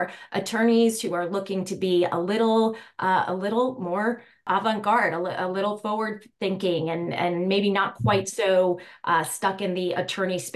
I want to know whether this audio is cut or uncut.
cut